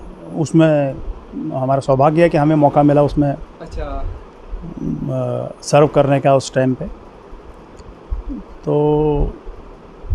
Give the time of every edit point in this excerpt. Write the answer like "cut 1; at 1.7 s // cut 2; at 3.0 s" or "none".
none